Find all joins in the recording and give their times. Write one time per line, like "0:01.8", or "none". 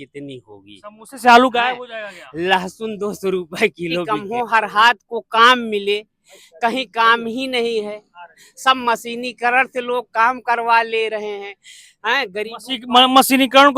0:04.1